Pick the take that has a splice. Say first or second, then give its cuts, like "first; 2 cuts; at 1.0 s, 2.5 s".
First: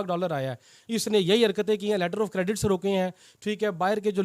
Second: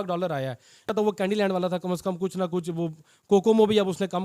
second; 1 cut; at 0.9 s